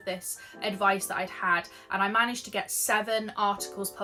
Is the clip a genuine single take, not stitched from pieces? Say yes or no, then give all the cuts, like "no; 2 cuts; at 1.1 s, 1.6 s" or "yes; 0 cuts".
yes; 0 cuts